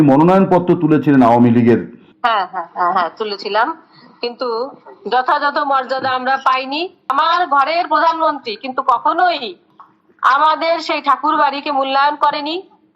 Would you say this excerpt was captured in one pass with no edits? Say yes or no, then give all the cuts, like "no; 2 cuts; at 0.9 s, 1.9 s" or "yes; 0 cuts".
no; 1 cut; at 7.1 s